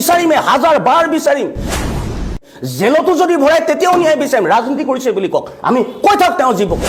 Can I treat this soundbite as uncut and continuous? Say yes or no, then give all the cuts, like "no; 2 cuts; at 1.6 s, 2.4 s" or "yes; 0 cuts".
yes; 0 cuts